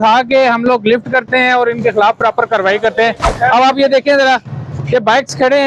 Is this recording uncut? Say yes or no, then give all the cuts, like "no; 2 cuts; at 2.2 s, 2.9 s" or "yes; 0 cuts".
yes; 0 cuts